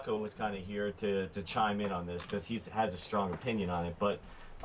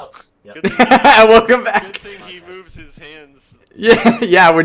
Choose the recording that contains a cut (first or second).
first